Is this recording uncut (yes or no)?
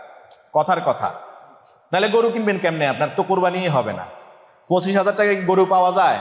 yes